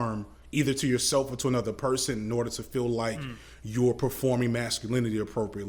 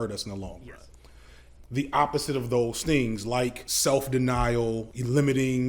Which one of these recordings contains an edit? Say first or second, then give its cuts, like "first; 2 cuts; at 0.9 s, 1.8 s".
second; 3 cuts; at 1.3 s, 3.7 s, 4.9 s